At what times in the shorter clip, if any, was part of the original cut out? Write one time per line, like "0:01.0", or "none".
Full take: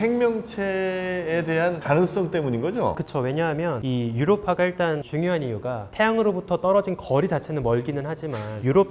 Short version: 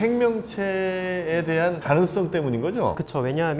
none